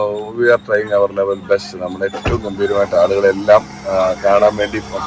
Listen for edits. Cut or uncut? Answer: uncut